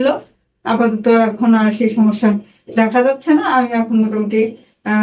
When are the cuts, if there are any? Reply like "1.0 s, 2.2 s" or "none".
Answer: none

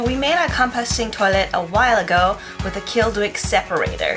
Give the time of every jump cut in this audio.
none

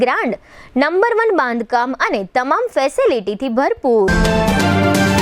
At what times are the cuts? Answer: 4.1 s

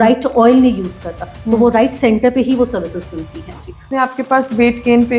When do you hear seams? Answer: 3.8 s

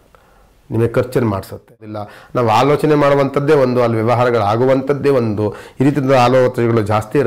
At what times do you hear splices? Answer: 2.0 s

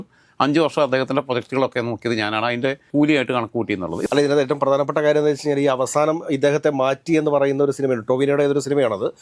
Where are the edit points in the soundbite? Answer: 2.9 s, 4.1 s

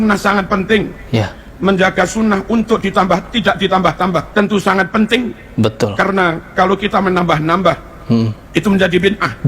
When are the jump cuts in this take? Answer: 4.3 s

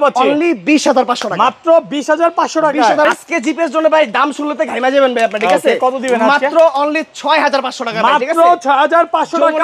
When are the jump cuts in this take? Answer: 3.1 s

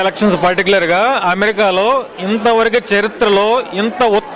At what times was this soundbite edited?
none

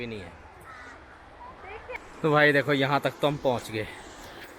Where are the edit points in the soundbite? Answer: none

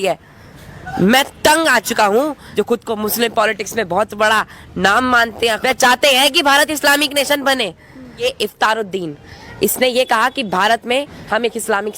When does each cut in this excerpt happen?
2.4 s, 5.6 s, 8.2 s

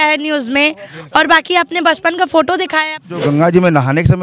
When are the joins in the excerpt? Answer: 3.2 s

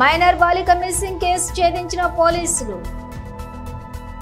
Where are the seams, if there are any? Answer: none

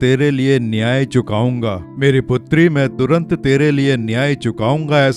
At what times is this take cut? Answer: 1.8 s

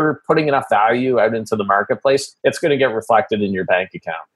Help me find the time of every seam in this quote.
2.3 s

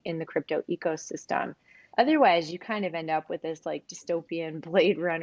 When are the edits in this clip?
1.8 s

